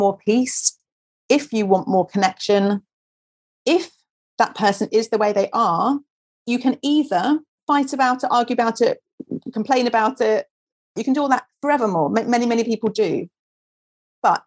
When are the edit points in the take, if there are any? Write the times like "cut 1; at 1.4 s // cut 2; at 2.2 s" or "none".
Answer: cut 1; at 6.4 s // cut 2; at 7.6 s // cut 3; at 10.9 s

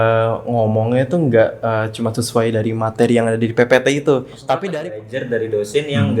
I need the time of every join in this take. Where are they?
cut 1; at 4.7 s

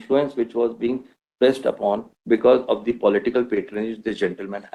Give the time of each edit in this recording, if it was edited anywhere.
none

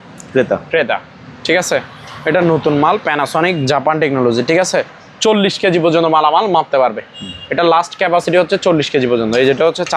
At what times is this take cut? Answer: none

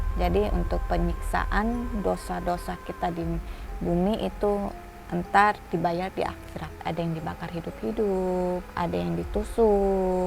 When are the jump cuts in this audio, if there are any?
cut 1; at 6.8 s // cut 2; at 8.7 s

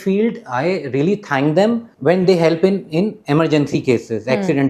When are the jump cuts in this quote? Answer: cut 1; at 1.9 s // cut 2; at 3.2 s

